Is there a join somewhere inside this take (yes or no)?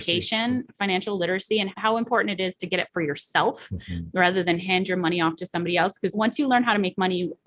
yes